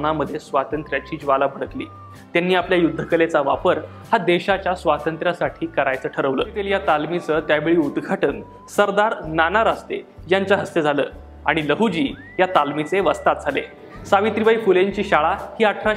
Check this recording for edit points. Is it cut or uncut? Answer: cut